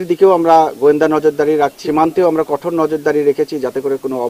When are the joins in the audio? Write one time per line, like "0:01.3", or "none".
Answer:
0:01.8